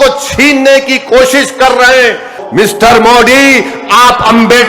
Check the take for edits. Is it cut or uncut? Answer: cut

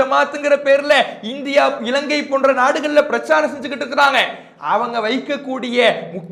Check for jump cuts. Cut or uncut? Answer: uncut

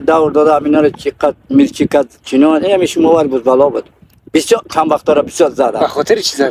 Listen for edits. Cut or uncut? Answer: uncut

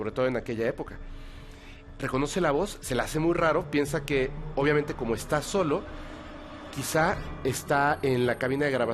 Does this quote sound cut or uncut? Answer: uncut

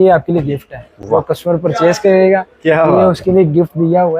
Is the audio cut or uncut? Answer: uncut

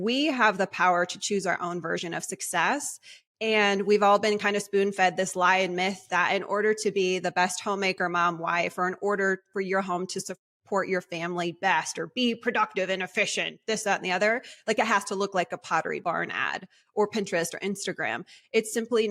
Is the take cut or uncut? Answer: cut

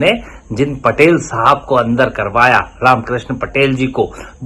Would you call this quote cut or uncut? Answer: uncut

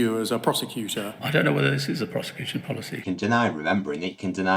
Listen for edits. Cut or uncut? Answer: cut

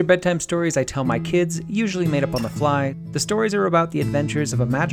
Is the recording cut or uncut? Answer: cut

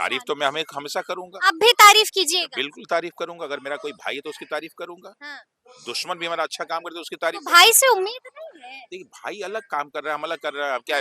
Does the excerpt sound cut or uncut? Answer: uncut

